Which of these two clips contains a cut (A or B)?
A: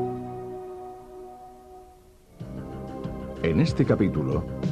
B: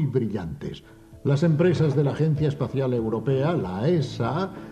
A